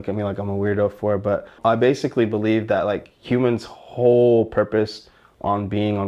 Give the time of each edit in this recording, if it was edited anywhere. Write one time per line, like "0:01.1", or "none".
0:01.6